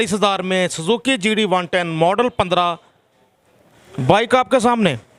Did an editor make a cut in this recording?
no; 0 cuts

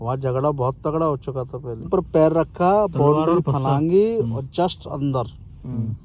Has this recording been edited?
yes; 1 cut; at 1.9 s

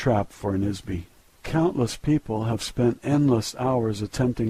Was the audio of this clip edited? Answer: no; 0 cuts

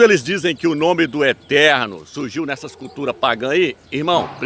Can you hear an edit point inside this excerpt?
no; 0 cuts

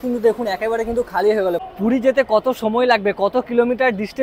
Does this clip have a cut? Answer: yes; 1 cut; at 1.7 s

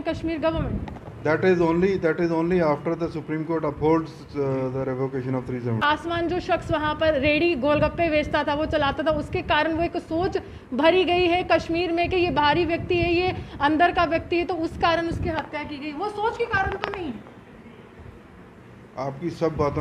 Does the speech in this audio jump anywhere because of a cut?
yes; 1 cut; at 5.8 s

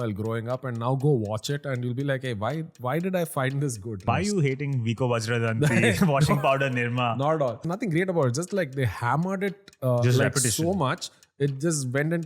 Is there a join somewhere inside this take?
yes; 2 cuts; at 4.1 s, 7.7 s

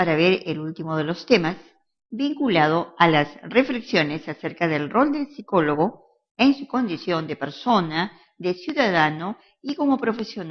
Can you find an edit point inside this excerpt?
yes; 1 cut; at 8.3 s

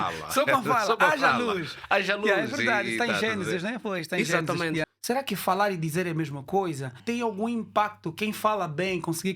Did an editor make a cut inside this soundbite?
yes; 2 cuts; at 4.9 s, 7.0 s

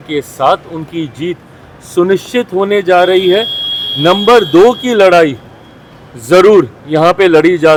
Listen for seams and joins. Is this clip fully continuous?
yes; 0 cuts

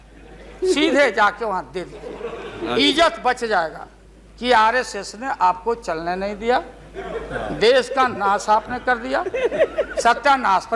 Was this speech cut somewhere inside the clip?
no; 0 cuts

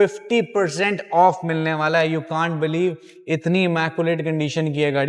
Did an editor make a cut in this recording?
no; 0 cuts

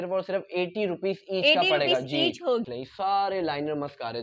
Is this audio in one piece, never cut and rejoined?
no; 1 cut; at 2.7 s

